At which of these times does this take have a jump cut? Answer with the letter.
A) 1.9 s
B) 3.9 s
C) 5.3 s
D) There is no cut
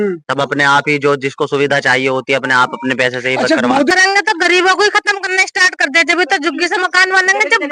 B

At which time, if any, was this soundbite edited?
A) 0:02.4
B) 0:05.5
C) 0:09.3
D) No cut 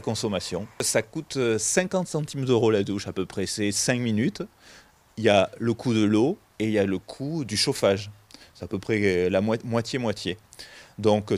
C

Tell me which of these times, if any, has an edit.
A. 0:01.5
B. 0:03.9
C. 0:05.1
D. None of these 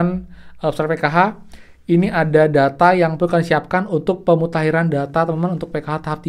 D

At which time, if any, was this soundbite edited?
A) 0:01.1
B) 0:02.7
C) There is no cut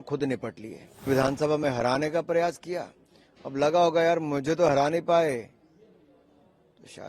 A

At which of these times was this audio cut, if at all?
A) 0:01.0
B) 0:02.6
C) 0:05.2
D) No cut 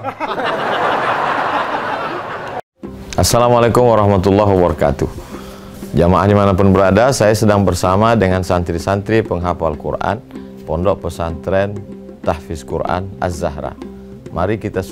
B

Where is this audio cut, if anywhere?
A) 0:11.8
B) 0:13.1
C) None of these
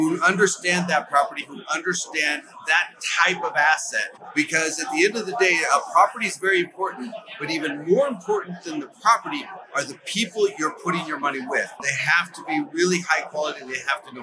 A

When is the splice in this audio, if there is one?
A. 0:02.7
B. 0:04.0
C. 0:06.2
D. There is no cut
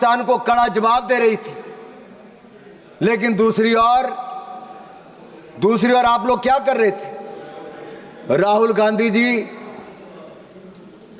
D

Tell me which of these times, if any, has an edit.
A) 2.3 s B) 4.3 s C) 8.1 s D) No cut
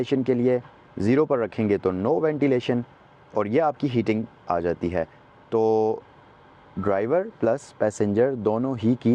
D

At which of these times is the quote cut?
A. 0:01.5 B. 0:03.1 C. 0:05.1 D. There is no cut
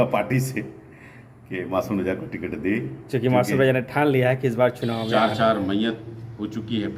C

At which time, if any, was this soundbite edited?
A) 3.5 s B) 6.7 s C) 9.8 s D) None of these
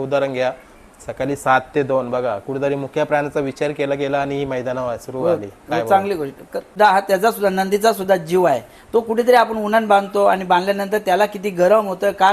B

